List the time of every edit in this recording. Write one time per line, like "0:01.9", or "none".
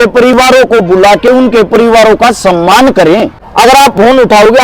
0:03.4